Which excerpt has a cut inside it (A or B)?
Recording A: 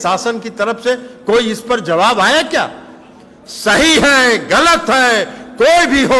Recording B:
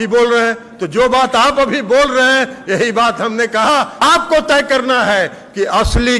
B